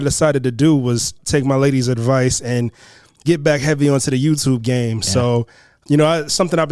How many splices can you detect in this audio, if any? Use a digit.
2